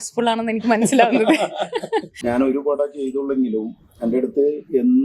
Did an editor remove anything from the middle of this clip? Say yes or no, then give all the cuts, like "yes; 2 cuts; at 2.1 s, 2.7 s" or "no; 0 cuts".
yes; 1 cut; at 2.1 s